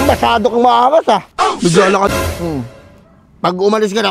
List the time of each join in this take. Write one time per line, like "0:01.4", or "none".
0:02.1

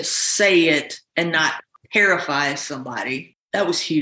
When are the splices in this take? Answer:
none

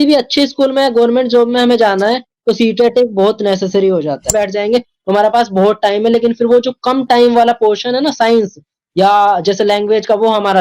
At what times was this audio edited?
0:04.3

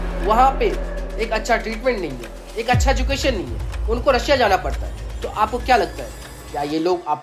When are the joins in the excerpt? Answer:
none

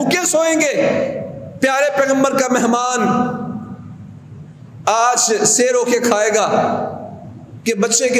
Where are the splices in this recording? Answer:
none

